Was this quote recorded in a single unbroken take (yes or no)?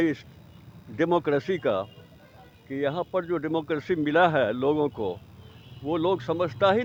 yes